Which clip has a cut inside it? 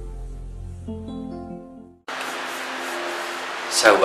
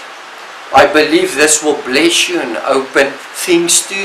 first; 1 cut; at 1.8 s

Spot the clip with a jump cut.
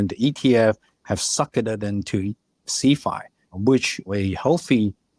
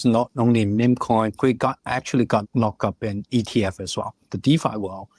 second; 3 cuts; at 1.3 s, 2.4 s, 4.3 s

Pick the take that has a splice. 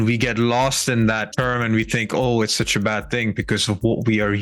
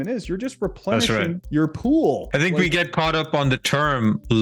second; 1 cut; at 2.2 s

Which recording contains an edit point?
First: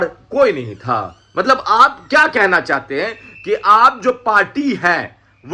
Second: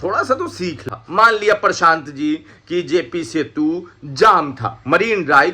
second; 1 cut; at 0.9 s

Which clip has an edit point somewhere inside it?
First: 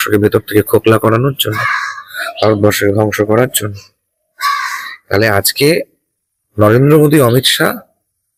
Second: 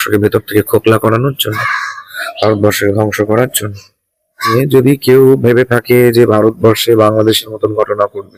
second; 1 cut; at 4.5 s

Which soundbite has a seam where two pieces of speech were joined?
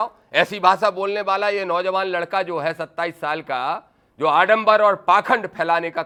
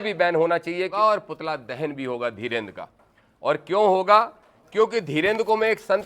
second; 1 cut; at 0.9 s

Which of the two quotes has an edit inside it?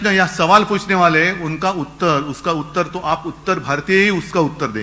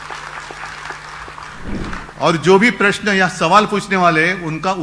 second; 1 cut; at 1.9 s

